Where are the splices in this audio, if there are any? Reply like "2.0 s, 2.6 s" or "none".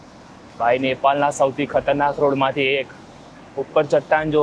none

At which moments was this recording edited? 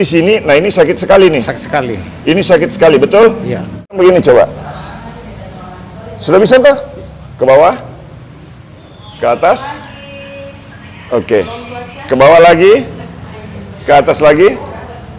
4.0 s

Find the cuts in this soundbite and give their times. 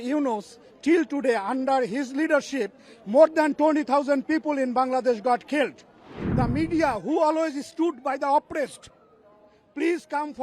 6.2 s

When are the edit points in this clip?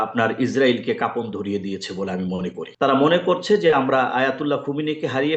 2.6 s

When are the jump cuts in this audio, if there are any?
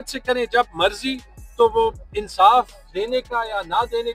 none

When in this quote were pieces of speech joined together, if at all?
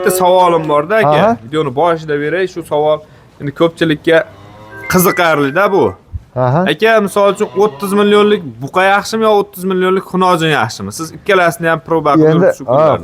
none

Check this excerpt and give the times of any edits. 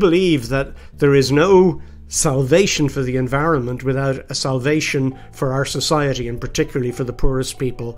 none

